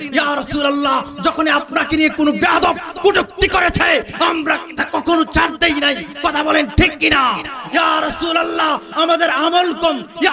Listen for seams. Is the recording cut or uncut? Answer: uncut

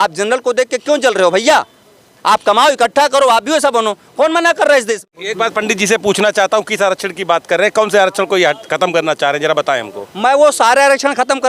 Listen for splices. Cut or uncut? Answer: cut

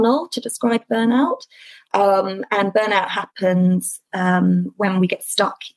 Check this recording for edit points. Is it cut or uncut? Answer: uncut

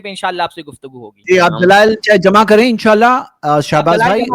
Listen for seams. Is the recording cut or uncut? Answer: cut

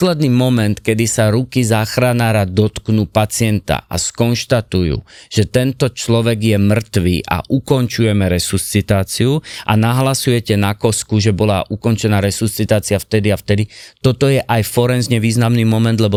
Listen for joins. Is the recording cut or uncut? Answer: uncut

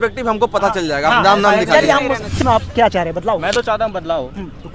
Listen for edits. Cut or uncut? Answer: cut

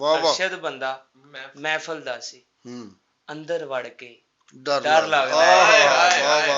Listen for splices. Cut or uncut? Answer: uncut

